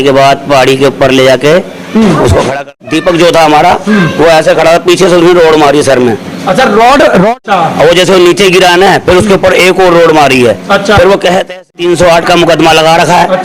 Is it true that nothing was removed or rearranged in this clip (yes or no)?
no